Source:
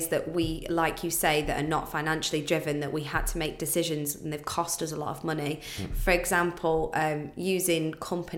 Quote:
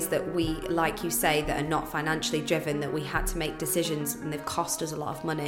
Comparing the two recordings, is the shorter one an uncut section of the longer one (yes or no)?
yes